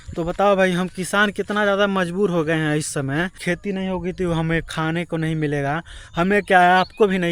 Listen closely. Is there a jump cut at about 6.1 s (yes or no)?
no